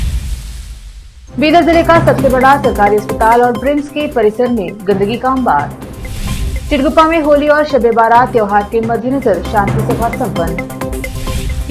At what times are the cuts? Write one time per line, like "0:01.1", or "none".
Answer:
0:01.0

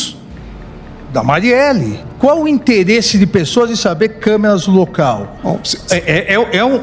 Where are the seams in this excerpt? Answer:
0:02.0

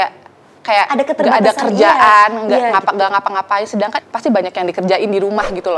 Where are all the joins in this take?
0:04.1

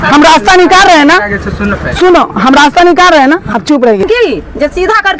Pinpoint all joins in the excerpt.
0:04.1

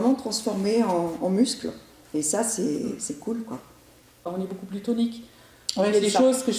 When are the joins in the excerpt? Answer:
0:04.3

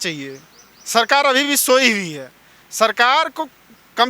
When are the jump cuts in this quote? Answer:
none

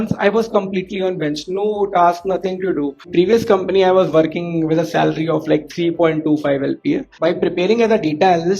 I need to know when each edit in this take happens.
0:03.0
0:07.1

